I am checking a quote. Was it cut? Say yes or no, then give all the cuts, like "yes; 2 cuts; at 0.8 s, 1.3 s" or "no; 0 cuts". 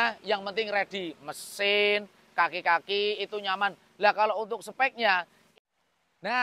yes; 1 cut; at 5.4 s